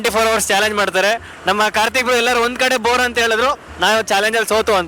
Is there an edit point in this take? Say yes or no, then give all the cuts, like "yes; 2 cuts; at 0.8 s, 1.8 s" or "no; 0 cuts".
no; 0 cuts